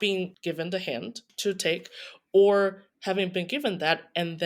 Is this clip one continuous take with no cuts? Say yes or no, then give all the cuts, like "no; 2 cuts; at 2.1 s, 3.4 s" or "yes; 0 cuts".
no; 1 cut; at 1.3 s